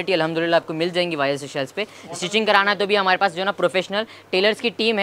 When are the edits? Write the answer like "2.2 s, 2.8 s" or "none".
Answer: none